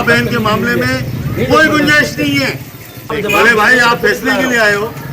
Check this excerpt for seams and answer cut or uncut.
cut